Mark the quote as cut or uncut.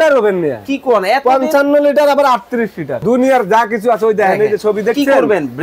cut